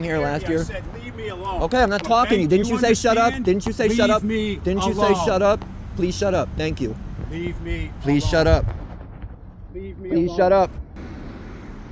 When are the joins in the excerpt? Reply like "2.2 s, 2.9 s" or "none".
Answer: 11.0 s